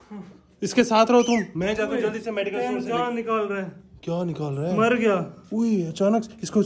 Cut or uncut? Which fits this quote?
uncut